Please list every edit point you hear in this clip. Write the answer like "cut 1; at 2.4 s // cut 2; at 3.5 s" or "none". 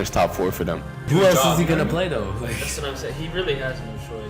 cut 1; at 1.0 s

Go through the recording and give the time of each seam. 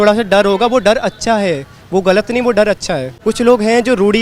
cut 1; at 3.1 s

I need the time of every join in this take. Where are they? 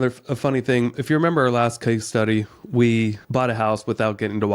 cut 1; at 3.2 s

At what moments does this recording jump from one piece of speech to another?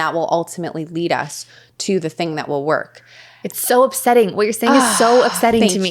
none

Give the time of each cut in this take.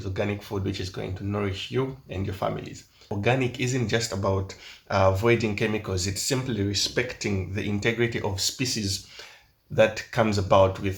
cut 1; at 3.0 s

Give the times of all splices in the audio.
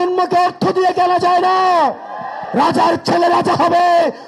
cut 1; at 2.4 s

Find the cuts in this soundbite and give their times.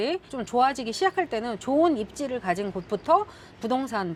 none

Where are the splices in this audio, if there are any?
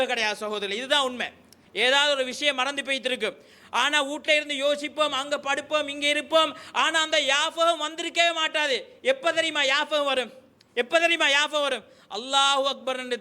cut 1; at 1.6 s

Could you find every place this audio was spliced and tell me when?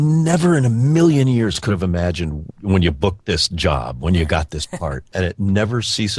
cut 1; at 2.4 s // cut 2; at 5.1 s

